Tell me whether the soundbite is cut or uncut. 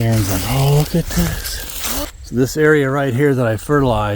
cut